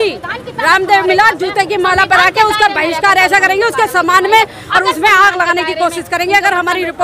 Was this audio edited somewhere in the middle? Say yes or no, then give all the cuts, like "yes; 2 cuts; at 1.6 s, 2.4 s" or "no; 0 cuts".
no; 0 cuts